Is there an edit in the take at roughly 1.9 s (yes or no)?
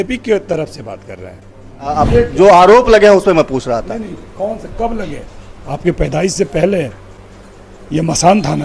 yes